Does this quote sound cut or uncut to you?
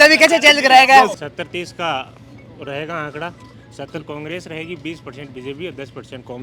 cut